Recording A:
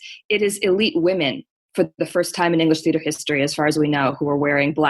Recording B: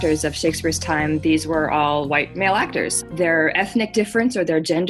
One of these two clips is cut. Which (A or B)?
B